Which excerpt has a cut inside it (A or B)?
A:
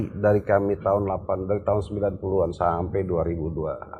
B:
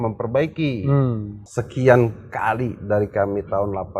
B